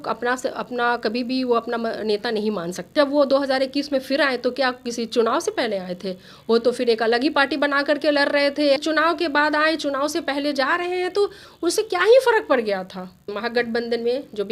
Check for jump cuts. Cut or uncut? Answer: cut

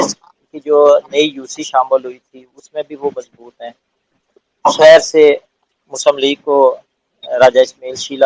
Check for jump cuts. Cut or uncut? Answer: uncut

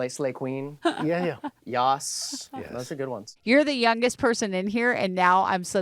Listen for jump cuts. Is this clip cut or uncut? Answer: cut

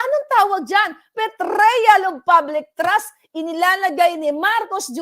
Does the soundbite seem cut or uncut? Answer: cut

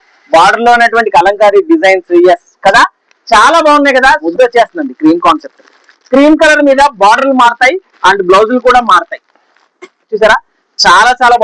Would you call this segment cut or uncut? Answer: cut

